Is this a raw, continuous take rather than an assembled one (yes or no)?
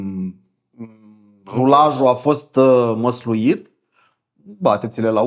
yes